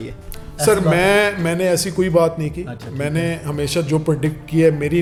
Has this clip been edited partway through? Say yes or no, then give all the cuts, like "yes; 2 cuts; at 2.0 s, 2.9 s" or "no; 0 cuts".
no; 0 cuts